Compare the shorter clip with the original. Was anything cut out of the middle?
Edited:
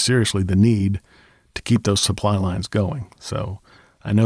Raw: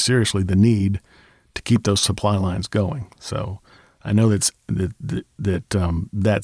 no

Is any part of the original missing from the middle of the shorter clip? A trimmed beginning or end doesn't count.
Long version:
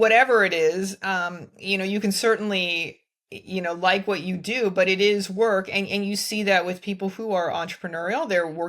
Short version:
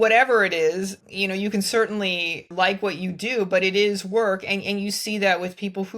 yes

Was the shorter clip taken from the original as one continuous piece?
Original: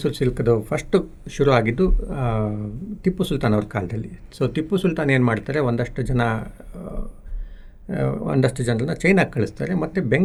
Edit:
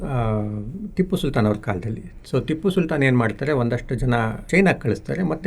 no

